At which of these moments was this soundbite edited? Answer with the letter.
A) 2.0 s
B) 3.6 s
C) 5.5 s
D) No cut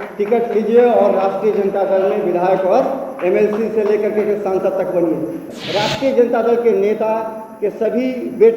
C